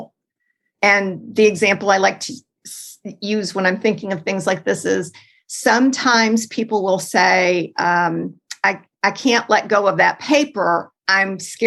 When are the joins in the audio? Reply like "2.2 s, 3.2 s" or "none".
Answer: none